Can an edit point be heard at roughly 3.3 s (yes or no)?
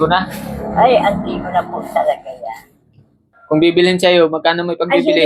yes